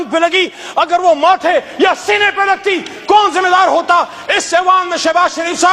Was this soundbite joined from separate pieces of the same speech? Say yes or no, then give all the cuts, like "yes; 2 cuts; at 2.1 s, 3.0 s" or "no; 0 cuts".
no; 0 cuts